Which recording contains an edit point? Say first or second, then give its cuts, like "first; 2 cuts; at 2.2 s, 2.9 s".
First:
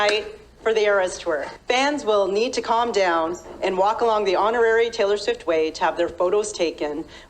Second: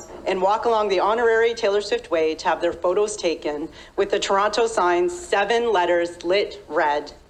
first; 1 cut; at 1.5 s